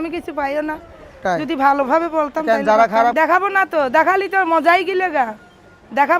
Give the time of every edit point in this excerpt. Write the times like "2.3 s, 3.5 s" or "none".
3.1 s